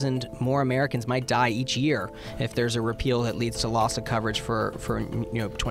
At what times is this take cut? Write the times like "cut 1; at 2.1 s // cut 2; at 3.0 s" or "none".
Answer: none